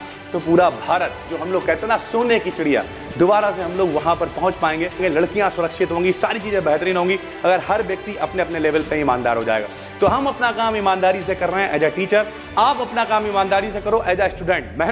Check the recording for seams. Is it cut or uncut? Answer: cut